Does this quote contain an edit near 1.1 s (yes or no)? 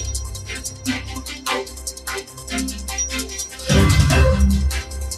yes